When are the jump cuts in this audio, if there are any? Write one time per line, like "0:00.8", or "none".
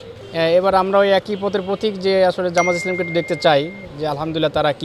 none